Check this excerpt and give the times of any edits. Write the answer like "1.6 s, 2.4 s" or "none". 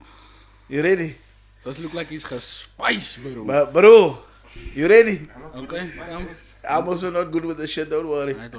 none